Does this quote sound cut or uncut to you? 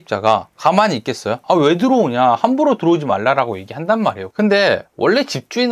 cut